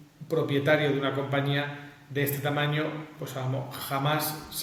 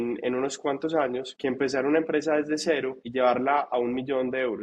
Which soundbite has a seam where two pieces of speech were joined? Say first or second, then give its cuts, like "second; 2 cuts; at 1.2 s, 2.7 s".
second; 2 cuts; at 1.3 s, 3.0 s